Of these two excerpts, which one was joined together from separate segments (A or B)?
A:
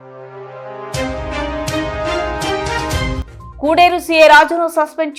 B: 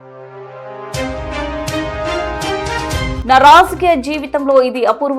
B